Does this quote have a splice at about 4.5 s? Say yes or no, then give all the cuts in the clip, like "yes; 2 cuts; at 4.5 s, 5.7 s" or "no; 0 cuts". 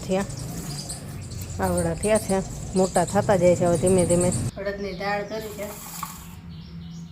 yes; 1 cut; at 4.5 s